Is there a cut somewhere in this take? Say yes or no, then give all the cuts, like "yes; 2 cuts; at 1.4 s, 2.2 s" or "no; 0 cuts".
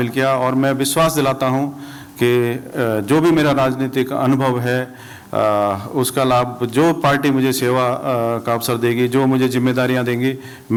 no; 0 cuts